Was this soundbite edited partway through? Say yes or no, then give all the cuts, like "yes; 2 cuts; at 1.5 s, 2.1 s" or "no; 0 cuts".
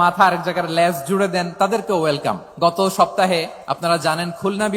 yes; 2 cuts; at 2.5 s, 3.6 s